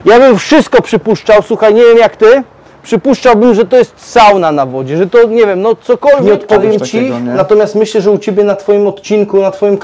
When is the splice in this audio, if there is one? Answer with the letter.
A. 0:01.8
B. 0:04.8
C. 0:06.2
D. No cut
C